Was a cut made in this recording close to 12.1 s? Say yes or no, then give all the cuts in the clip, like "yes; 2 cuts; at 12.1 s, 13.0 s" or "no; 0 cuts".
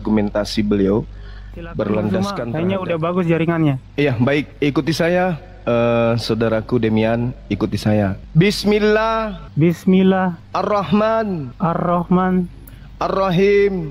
no; 1 cut; at 2.4 s